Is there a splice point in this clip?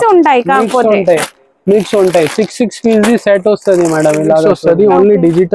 yes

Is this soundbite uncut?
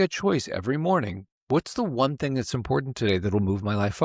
yes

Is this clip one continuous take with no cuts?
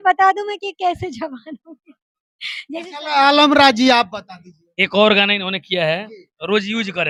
yes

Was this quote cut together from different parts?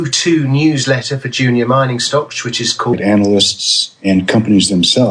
no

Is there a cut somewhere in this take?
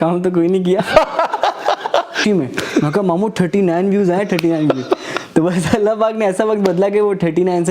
yes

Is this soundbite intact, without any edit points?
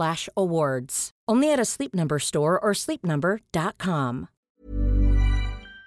no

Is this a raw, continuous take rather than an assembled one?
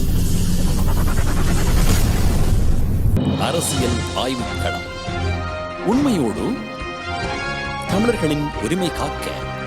no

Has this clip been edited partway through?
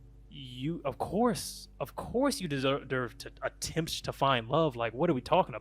no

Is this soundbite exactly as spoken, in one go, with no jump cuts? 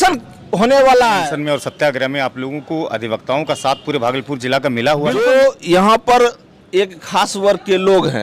no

